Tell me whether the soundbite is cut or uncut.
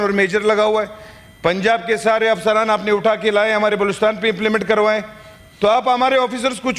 uncut